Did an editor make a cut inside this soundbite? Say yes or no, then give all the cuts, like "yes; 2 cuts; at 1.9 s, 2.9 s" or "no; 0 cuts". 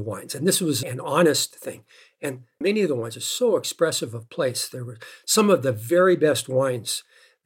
no; 0 cuts